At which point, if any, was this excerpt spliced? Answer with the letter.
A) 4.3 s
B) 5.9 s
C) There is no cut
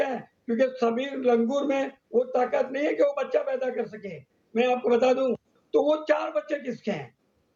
C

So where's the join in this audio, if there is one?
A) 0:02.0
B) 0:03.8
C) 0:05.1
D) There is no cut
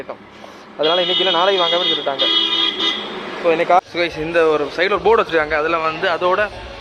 B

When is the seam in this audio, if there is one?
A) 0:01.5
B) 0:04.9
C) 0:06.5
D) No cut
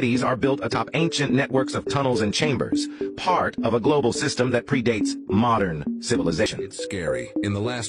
C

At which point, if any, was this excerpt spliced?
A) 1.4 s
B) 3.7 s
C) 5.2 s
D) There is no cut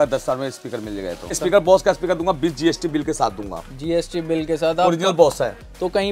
A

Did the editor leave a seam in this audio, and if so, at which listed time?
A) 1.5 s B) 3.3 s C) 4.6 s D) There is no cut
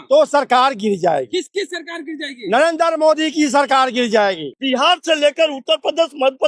C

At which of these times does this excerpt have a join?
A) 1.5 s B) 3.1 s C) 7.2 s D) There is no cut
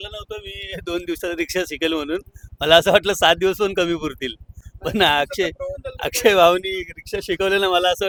D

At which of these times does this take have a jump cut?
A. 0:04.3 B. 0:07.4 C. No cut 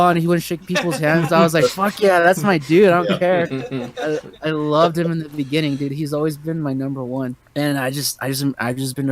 B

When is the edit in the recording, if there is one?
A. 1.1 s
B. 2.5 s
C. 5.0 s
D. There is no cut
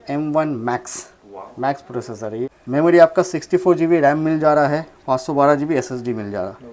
B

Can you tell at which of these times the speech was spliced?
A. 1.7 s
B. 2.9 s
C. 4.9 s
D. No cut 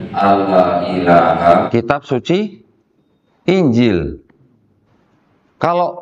A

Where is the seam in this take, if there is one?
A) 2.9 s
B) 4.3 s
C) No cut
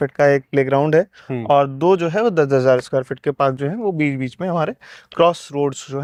C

